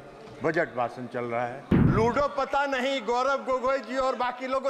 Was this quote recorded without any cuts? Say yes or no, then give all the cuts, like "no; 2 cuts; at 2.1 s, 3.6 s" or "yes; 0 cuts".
no; 1 cut; at 1.8 s